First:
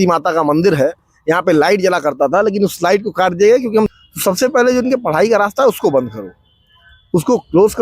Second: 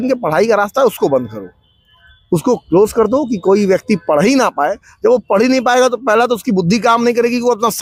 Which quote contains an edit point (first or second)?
first